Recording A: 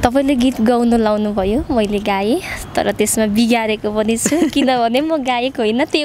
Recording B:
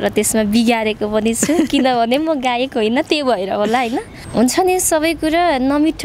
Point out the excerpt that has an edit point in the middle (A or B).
B